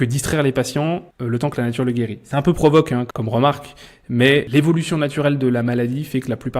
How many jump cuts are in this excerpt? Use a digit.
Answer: 3